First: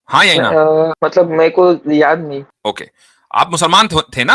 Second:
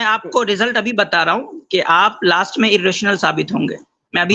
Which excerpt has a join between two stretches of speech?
first; 2 cuts; at 1.0 s, 2.5 s

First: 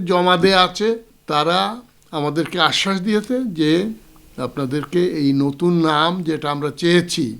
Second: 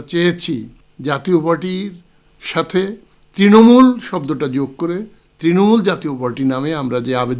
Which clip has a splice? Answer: first; 1 cut; at 1.1 s

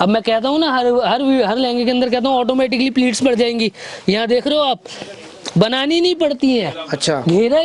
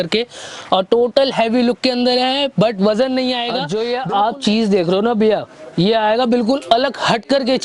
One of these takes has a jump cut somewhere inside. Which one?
second; 1 cut; at 3.6 s

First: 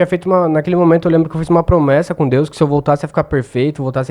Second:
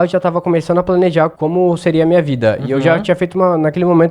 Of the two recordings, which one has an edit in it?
second; 1 cut; at 1.4 s

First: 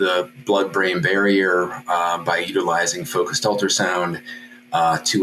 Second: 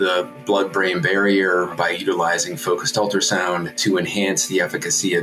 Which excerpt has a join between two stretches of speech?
second; 2 cuts; at 1.7 s, 3.8 s

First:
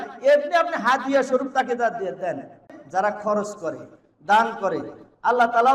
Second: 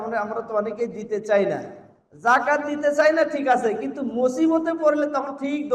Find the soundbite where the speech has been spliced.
first; 1 cut; at 2.7 s

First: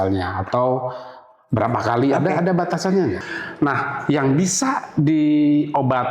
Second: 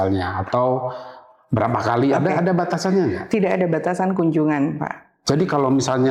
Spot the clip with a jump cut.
first; 1 cut; at 3.2 s

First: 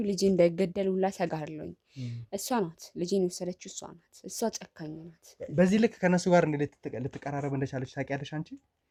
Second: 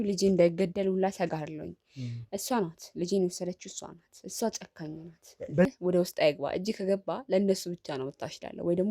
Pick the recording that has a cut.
second; 1 cut; at 5.7 s

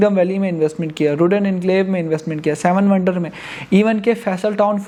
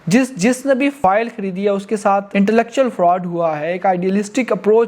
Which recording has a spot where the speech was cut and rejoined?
second; 2 cuts; at 1.0 s, 2.3 s

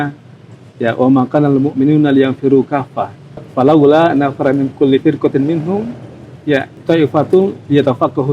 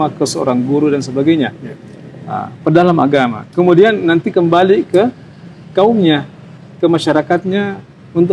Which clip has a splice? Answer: first; 2 cuts; at 3.5 s, 6.7 s

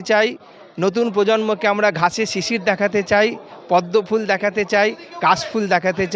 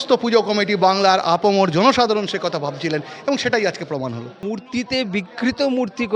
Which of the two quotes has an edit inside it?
second; 1 cut; at 4.4 s

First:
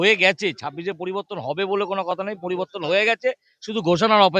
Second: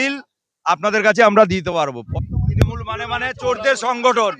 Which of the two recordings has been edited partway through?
second; 1 cut; at 2.0 s

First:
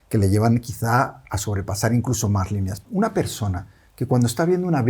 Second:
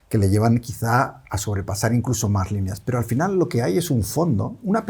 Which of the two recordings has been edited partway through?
first; 1 cut; at 2.8 s

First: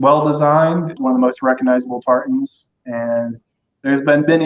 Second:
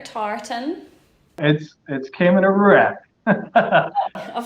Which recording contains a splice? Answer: first; 1 cut; at 0.9 s

